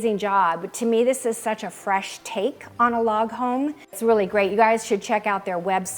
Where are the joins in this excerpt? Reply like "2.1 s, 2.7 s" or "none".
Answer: 4.0 s